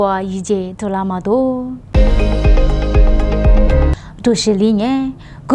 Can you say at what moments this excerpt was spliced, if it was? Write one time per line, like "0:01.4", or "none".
0:01.8